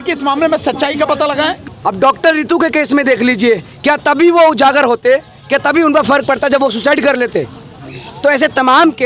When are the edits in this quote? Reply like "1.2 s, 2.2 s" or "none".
1.7 s

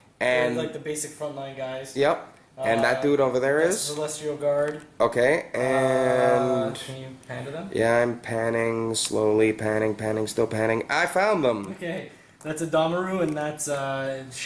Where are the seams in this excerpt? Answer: 4.9 s

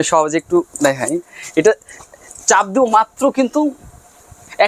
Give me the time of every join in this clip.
none

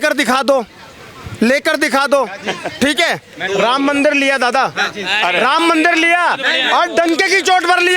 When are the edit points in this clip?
none

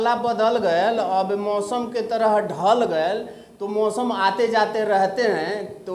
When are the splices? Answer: none

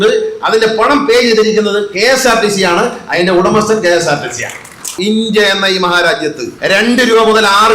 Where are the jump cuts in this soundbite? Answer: 5.0 s, 6.5 s

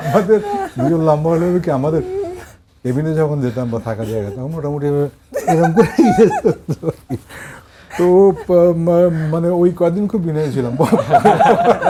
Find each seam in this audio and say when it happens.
none

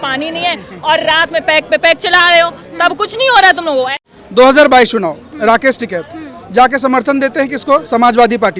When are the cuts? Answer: 4.0 s

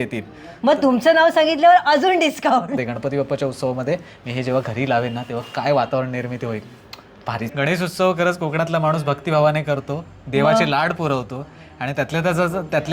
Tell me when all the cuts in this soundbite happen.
2.8 s, 7.5 s

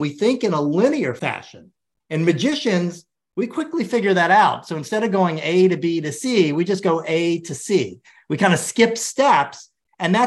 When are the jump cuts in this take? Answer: 1.2 s

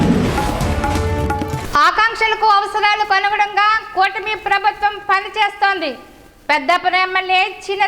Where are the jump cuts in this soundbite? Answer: 1.5 s

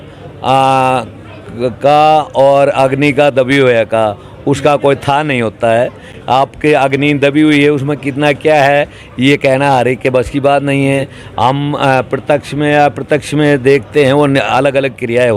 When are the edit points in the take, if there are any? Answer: none

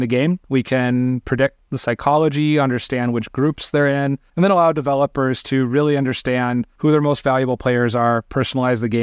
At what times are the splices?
4.2 s, 6.7 s

